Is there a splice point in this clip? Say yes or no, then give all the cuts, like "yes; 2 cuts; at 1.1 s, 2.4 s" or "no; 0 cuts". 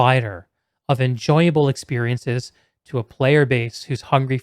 no; 0 cuts